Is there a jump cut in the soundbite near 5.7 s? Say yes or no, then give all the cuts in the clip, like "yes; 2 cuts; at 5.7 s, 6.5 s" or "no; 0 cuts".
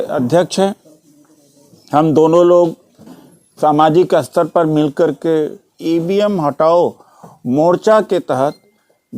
yes; 1 cut; at 5.7 s